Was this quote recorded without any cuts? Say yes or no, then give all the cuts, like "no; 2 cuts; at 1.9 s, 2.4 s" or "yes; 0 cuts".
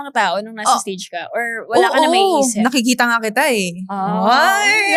yes; 0 cuts